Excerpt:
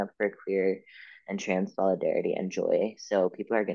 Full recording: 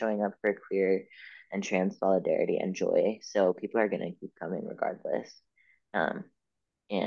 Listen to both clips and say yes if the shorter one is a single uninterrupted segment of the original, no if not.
yes